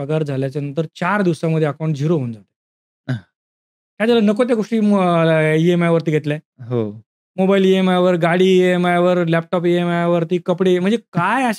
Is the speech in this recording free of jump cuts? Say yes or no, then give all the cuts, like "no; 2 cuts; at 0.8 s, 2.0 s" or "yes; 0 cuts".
yes; 0 cuts